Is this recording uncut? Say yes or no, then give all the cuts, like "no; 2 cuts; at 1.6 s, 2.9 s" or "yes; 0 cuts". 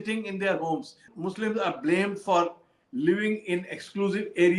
no; 1 cut; at 1.1 s